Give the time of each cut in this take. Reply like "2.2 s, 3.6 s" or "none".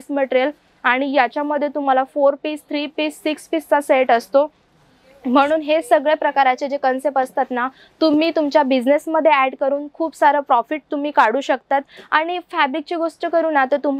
none

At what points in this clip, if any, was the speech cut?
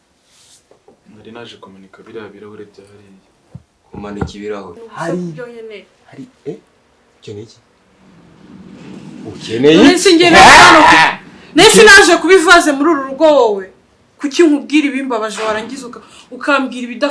4.9 s

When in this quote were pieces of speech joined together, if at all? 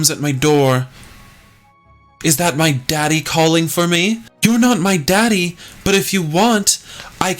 4.3 s

